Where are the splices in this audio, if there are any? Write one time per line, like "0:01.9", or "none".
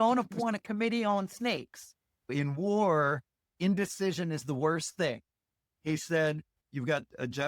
0:02.3
0:03.5
0:06.5